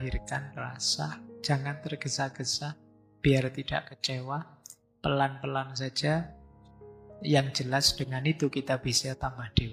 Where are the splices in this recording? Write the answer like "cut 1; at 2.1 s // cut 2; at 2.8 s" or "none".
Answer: none

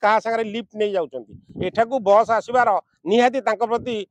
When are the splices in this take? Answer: none

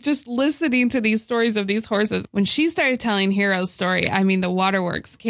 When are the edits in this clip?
cut 1; at 2.2 s

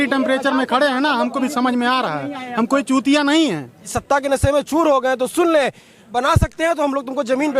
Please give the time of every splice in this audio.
cut 1; at 3.8 s // cut 2; at 6.1 s

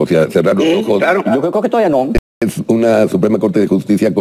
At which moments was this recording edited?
cut 1; at 2.1 s

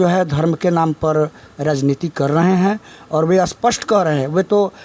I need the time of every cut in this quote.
none

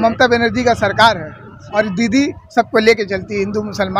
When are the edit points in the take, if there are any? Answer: cut 1; at 1.6 s

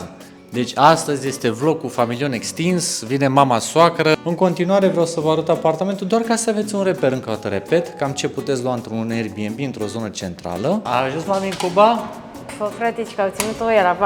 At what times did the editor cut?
cut 1; at 4.2 s // cut 2; at 10.9 s

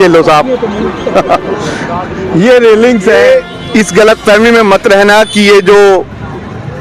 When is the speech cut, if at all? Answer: cut 1; at 3.1 s

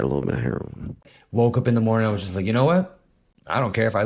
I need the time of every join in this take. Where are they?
cut 1; at 1.2 s

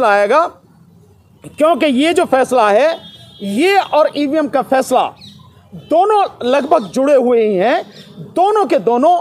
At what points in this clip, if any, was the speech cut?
none

